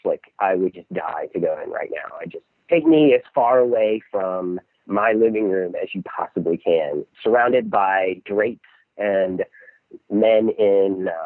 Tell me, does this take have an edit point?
yes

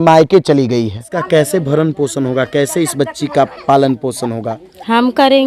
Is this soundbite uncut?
no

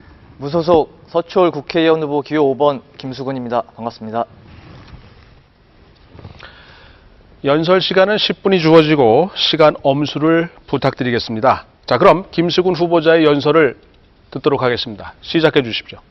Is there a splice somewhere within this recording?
no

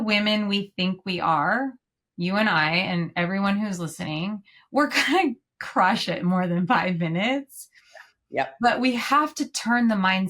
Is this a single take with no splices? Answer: yes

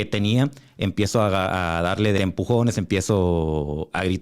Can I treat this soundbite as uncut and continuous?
no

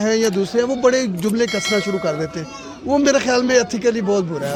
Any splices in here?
no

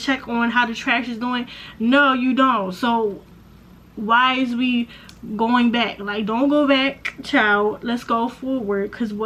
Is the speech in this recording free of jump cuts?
yes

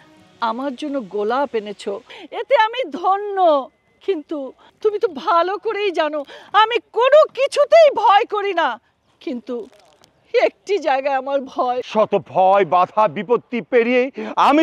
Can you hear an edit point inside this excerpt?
no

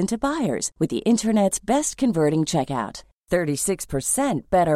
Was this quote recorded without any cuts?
yes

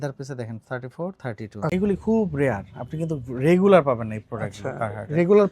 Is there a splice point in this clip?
yes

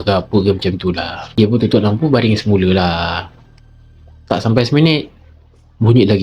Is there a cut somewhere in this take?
no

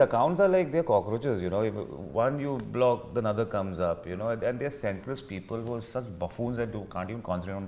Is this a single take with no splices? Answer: yes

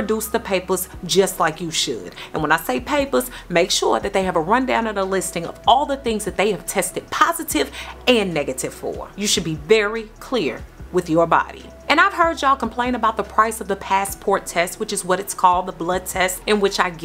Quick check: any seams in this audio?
no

